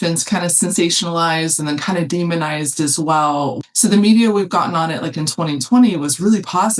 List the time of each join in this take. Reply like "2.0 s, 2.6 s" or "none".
3.6 s